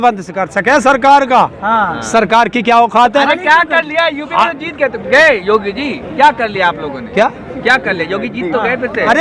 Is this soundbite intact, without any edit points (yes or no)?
yes